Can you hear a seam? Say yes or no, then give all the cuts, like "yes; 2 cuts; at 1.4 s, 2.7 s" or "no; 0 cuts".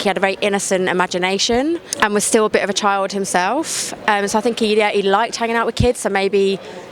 no; 0 cuts